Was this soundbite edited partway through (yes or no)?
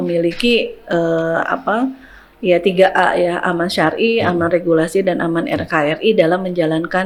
no